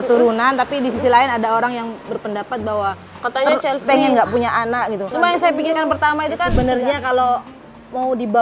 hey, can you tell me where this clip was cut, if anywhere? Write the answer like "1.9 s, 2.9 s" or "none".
6.5 s